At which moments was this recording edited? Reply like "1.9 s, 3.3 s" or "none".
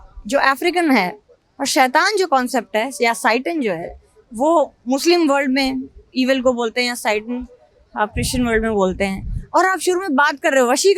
none